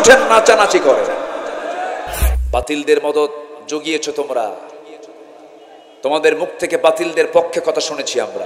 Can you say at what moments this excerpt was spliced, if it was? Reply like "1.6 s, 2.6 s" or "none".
2.3 s